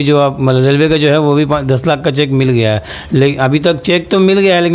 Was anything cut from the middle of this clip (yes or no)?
no